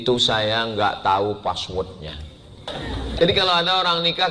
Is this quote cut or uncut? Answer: cut